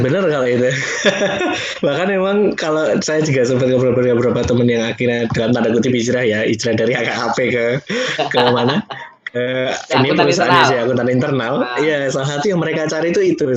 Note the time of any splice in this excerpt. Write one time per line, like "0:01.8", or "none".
none